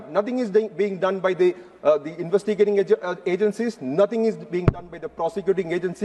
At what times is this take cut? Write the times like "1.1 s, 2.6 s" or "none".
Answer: none